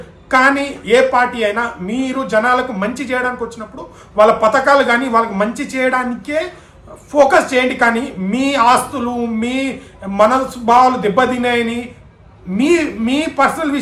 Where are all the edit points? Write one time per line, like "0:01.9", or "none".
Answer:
none